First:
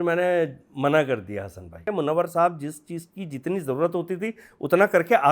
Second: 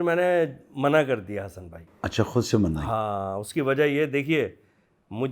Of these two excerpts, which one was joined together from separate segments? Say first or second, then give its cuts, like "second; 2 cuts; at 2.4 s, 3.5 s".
first; 1 cut; at 1.9 s